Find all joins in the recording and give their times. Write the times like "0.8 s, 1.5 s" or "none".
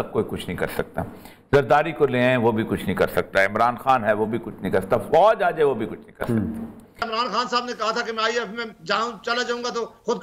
7.0 s